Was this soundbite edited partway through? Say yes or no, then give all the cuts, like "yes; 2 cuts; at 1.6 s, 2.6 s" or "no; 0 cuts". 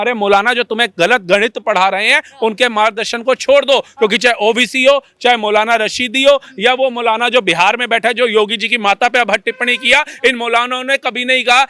no; 0 cuts